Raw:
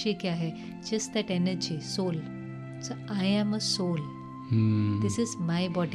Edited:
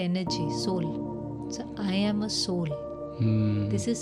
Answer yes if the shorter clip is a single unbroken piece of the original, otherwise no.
yes